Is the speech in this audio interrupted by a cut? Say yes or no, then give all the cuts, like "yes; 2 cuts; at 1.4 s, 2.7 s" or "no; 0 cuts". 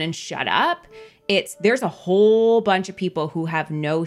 no; 0 cuts